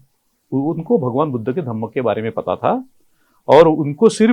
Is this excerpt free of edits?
yes; 0 cuts

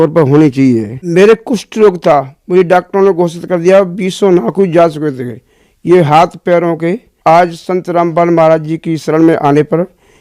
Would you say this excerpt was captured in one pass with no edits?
no; 2 cuts; at 1.0 s, 7.1 s

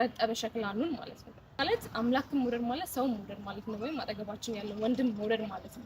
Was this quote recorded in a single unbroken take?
no; 1 cut; at 1.6 s

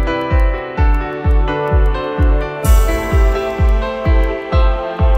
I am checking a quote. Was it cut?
no; 0 cuts

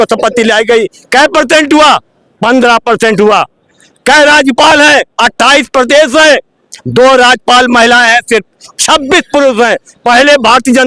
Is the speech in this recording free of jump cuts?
yes; 0 cuts

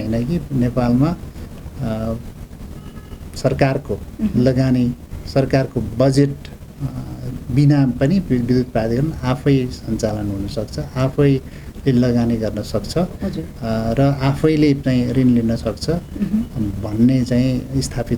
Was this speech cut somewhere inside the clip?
no; 0 cuts

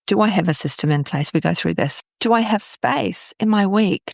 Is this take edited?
yes; 1 cut; at 2.0 s

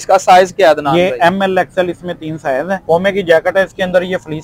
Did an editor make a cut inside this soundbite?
yes; 1 cut; at 2.8 s

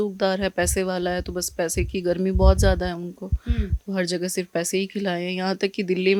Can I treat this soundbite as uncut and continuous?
yes; 0 cuts

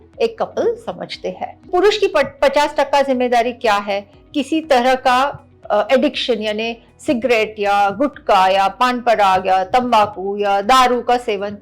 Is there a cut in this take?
yes; 2 cuts; at 1.7 s, 4.2 s

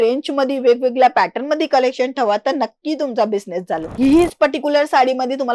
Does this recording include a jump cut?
yes; 1 cut; at 3.8 s

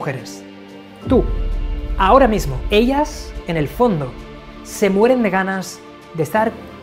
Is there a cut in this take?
yes; 1 cut; at 2.5 s

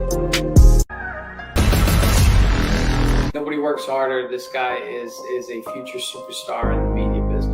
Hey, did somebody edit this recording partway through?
yes; 1 cut; at 1.5 s

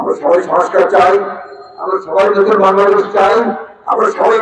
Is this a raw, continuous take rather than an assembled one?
yes; 0 cuts

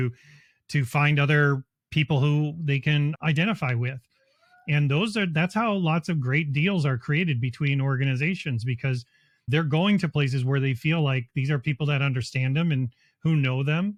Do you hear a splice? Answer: no; 0 cuts

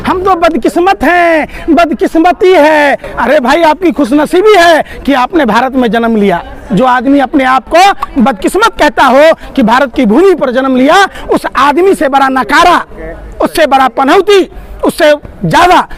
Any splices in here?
no; 0 cuts

